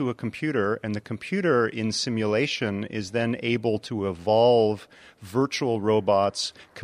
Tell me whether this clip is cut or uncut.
uncut